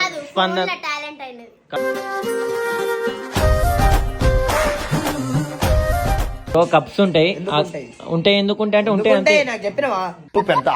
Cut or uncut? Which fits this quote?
cut